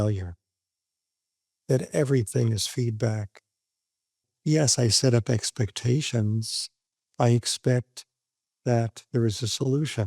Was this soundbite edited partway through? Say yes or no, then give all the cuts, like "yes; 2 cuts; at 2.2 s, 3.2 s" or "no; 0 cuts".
yes; 1 cut; at 4.2 s